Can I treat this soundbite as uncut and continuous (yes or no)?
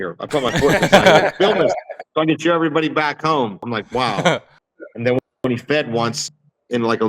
no